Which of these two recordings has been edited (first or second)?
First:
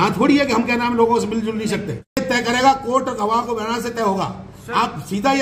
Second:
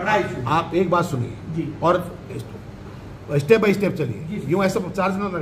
first